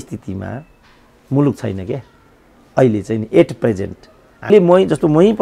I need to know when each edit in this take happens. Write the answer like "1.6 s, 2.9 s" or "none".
4.5 s